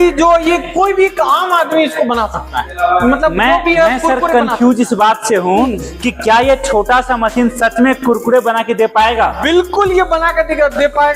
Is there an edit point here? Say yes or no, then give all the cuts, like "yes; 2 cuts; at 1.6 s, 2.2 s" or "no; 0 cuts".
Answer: no; 0 cuts